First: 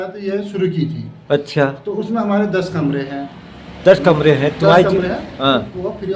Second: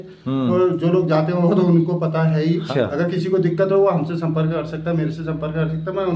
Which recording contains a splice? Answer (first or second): second